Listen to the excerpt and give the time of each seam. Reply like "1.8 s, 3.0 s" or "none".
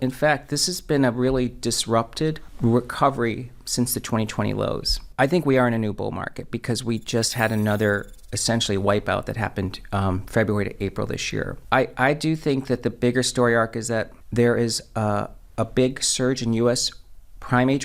2.5 s, 5.0 s, 11.6 s, 14.2 s